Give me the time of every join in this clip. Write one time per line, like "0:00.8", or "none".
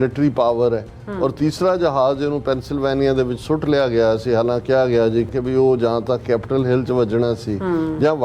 0:05.3